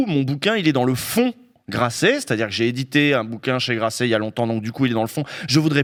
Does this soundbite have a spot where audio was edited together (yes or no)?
no